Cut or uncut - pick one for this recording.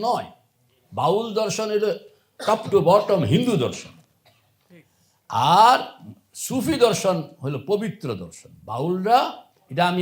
uncut